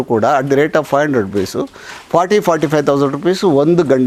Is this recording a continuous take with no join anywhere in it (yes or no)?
yes